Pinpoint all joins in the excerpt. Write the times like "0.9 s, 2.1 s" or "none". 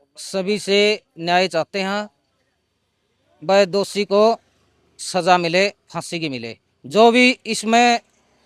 none